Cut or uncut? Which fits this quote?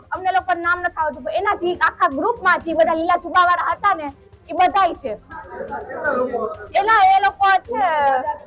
uncut